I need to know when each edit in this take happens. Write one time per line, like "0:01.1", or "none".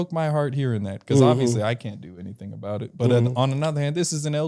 none